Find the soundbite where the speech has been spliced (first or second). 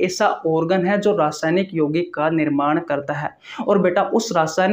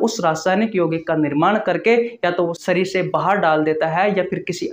second